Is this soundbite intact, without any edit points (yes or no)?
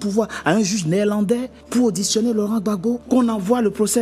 no